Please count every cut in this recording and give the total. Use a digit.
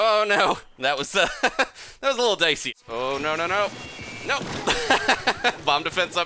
1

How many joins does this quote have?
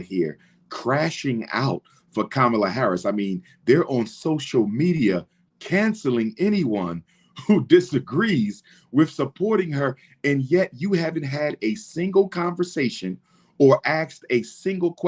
0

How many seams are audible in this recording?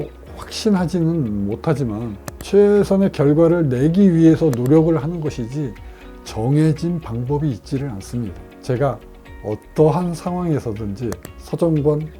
2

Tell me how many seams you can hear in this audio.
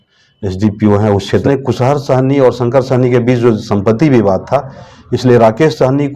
1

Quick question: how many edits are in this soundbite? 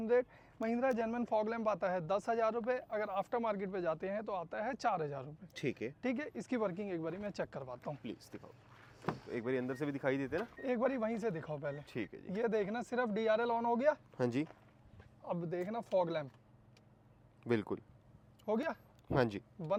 0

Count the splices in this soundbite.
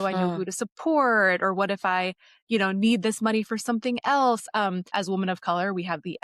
1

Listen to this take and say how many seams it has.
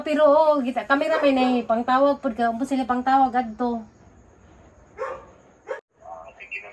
1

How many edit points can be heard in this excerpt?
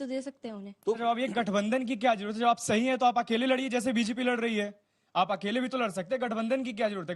1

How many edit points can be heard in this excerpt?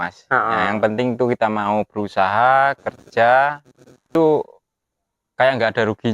1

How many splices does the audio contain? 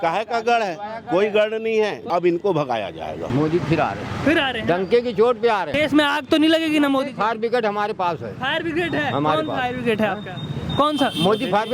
3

